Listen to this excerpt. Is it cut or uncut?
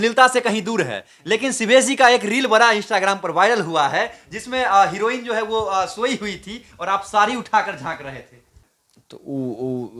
uncut